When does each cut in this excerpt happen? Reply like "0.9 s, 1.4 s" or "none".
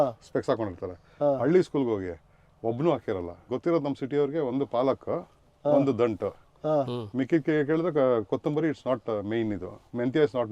none